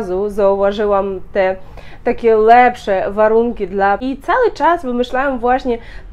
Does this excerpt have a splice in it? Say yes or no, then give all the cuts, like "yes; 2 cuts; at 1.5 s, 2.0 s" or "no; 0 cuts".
yes; 1 cut; at 4.0 s